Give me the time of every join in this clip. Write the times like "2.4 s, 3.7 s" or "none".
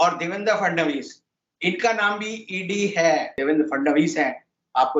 3.3 s